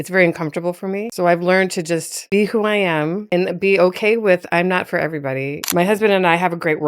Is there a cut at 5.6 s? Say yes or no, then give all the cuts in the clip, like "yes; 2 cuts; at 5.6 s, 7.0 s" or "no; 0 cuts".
yes; 3 cuts; at 1.1 s, 3.2 s, 5.6 s